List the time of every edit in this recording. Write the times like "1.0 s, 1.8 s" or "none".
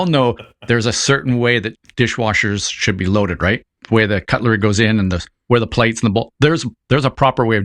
1.8 s, 3.8 s